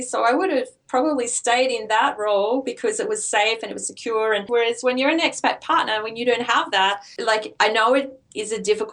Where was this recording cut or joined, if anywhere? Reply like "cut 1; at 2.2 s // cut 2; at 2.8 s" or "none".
cut 1; at 4.5 s // cut 2; at 7.1 s